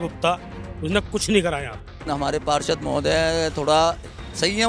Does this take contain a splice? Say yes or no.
yes